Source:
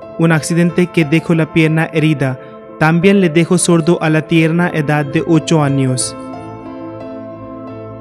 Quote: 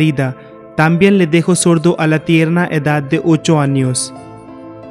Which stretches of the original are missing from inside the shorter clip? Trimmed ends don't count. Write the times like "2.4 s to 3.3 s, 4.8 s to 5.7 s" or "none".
6.0 s to 6.1 s